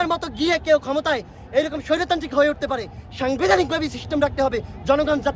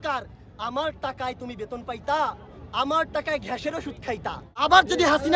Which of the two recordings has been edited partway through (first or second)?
second